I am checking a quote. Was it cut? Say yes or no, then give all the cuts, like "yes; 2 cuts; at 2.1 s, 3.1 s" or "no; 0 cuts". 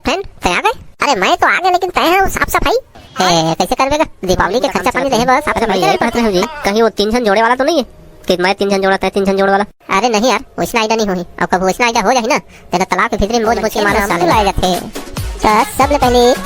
yes; 2 cuts; at 6.0 s, 14.1 s